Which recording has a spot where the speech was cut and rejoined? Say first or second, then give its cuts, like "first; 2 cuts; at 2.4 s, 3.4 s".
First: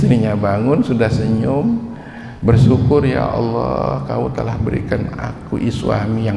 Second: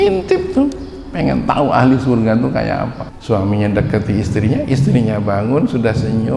second; 1 cut; at 3.1 s